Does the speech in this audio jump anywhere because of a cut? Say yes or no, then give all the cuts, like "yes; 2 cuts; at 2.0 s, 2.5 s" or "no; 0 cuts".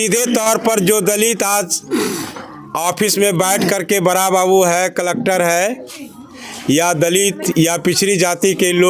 no; 0 cuts